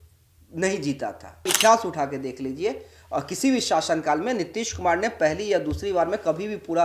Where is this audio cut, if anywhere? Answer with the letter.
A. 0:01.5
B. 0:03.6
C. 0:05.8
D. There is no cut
A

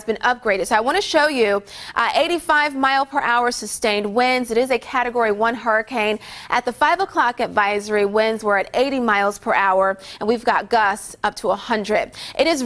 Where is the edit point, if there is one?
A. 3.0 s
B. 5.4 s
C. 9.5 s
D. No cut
C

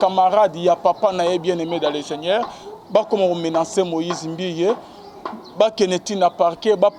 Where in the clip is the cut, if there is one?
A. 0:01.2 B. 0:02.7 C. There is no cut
C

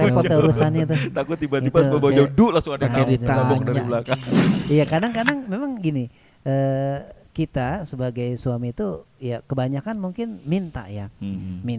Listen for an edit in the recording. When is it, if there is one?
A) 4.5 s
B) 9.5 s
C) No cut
A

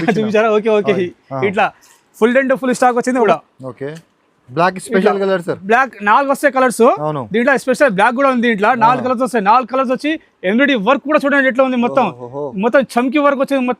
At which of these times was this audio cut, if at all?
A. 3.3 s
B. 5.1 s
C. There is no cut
A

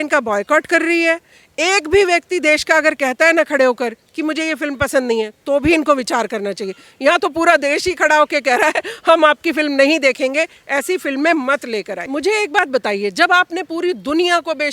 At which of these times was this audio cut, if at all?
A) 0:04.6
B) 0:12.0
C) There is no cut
B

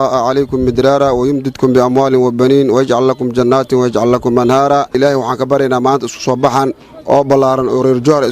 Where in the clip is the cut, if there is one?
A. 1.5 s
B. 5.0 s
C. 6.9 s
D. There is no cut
B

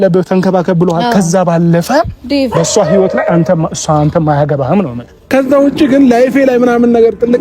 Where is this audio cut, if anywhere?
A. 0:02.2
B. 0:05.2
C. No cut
B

